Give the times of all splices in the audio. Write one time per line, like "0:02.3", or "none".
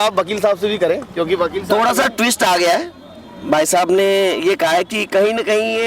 none